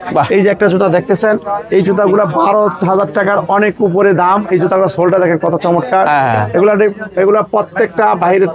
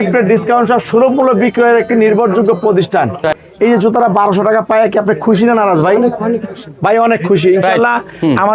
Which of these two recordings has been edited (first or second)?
second